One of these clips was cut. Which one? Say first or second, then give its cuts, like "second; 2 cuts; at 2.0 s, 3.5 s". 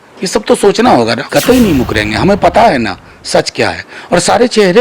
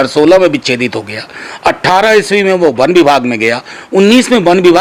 first; 1 cut; at 1.3 s